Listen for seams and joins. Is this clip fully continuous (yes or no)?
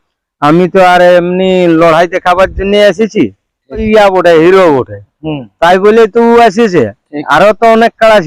no